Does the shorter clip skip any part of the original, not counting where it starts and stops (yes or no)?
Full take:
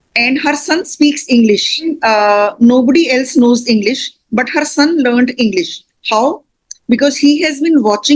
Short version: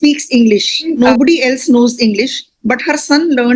yes